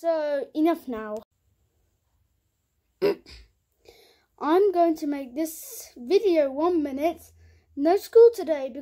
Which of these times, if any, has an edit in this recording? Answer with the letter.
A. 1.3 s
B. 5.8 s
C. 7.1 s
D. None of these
A